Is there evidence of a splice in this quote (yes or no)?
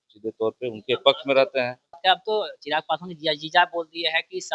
yes